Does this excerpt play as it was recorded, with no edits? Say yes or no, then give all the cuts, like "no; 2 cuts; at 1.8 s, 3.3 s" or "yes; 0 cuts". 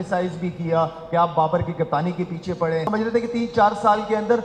no; 1 cut; at 2.9 s